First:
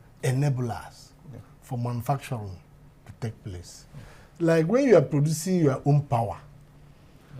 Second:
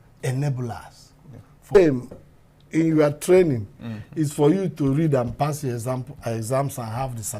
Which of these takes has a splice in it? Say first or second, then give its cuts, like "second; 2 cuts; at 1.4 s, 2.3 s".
second; 1 cut; at 1.8 s